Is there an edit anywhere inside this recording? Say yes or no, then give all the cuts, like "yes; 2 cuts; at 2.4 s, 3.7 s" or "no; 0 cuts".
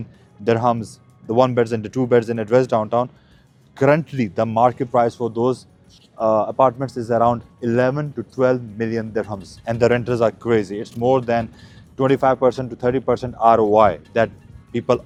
no; 0 cuts